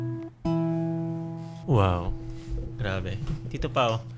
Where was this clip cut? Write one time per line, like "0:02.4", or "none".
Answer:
0:01.6